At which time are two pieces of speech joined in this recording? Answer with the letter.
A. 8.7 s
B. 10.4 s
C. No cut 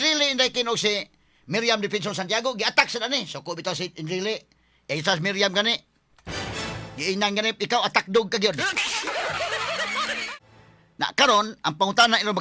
B